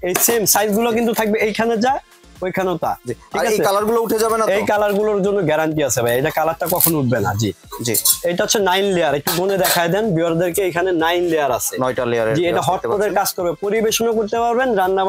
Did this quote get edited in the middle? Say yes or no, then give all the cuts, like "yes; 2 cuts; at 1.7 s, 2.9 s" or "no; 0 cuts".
no; 0 cuts